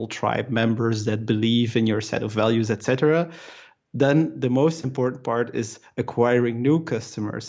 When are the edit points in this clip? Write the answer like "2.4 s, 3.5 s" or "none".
none